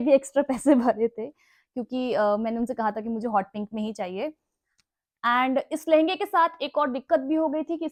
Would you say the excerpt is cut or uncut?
uncut